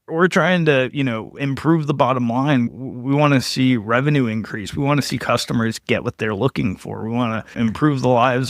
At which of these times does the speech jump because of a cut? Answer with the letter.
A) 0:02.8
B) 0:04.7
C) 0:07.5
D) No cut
C